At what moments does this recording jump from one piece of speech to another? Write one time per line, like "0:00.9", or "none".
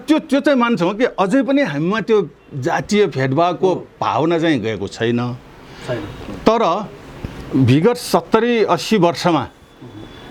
none

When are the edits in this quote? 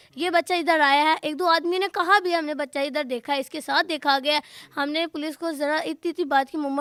none

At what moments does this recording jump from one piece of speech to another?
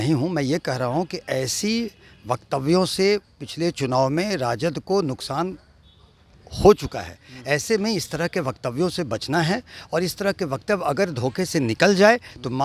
none

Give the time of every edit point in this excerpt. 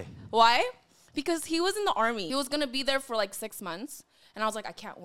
0:02.3

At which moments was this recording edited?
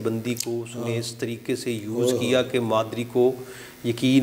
none

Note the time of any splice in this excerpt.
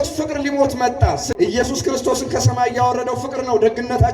0:01.3

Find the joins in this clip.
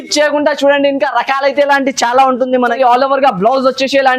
0:02.6

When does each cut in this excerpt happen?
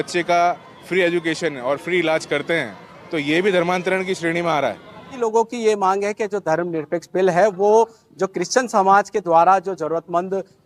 0:05.2

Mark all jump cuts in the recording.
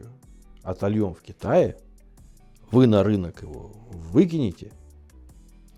none

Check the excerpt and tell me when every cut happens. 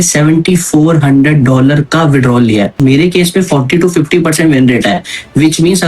0:02.8

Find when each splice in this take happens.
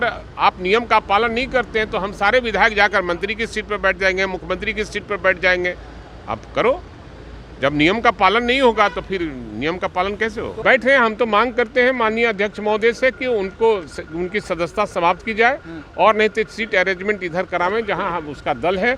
0:10.5

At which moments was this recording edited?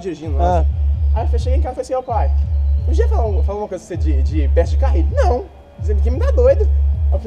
none

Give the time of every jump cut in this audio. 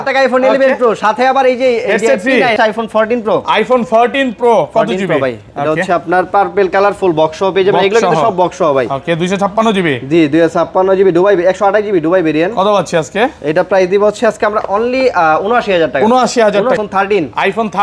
0:02.5
0:16.8

